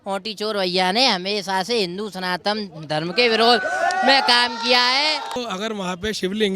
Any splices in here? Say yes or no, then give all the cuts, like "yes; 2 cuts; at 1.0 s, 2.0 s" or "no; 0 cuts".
yes; 1 cut; at 5.4 s